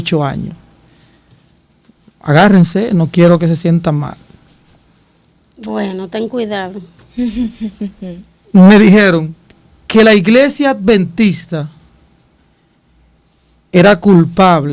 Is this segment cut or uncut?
uncut